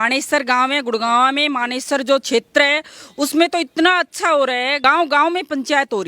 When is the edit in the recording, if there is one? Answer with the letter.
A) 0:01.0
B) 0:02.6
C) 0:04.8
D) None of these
C